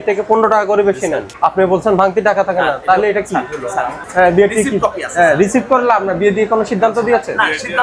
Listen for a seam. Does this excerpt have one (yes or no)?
yes